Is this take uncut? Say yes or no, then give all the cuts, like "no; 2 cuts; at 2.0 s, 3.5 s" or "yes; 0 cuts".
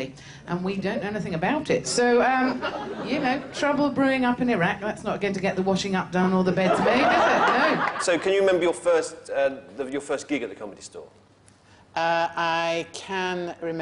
no; 1 cut; at 6.3 s